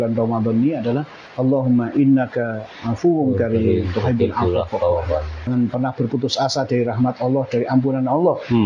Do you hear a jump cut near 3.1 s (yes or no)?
no